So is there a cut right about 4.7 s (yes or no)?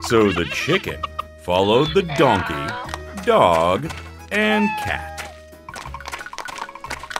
yes